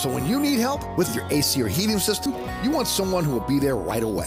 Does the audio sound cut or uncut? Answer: uncut